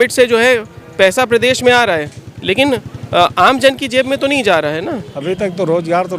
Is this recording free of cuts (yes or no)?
no